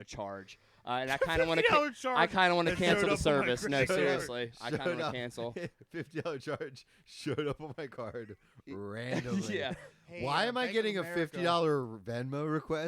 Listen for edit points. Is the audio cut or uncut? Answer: uncut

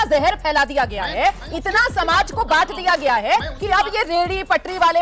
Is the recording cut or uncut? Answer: uncut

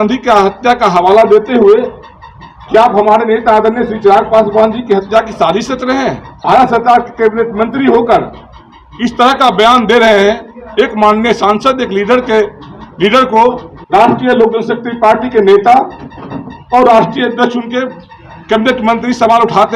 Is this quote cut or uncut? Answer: cut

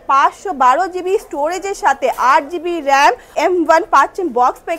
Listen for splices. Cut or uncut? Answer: cut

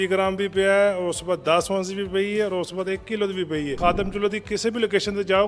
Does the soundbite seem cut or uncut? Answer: cut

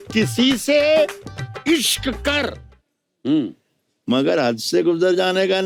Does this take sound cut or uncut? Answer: uncut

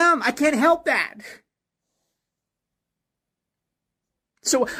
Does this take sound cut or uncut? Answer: uncut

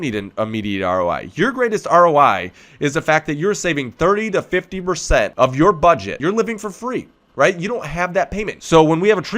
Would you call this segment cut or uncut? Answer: cut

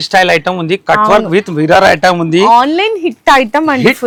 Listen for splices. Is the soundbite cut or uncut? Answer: uncut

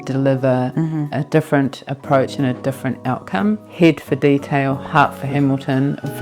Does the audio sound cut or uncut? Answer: cut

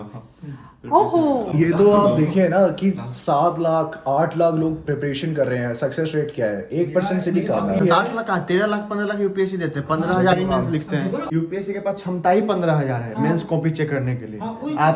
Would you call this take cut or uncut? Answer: cut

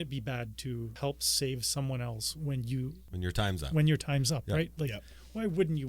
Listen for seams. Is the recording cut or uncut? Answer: cut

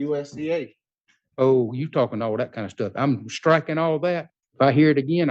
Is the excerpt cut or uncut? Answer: cut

